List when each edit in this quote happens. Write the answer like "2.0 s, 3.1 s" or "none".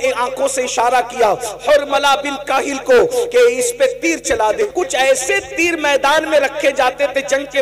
4.7 s